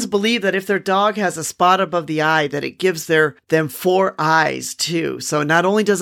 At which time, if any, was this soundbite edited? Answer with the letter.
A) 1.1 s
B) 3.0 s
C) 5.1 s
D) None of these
D